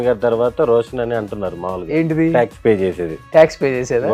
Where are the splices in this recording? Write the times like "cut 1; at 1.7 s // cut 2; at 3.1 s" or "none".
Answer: none